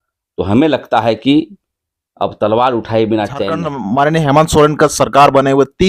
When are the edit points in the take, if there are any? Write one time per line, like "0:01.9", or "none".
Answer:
0:03.7